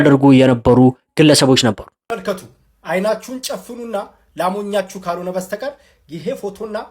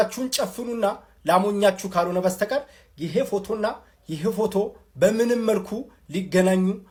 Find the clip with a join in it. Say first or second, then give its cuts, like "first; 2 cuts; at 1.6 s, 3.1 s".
first; 1 cut; at 1.9 s